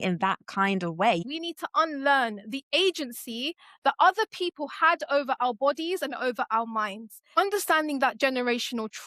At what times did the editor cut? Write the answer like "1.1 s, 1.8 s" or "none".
1.2 s, 7.4 s